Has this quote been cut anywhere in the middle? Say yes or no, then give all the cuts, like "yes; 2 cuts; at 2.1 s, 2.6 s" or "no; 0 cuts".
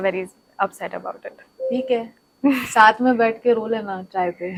no; 0 cuts